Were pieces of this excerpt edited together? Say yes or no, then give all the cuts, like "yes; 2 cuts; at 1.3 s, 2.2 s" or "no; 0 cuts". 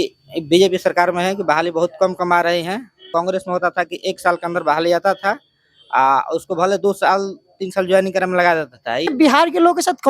yes; 2 cuts; at 3.0 s, 9.1 s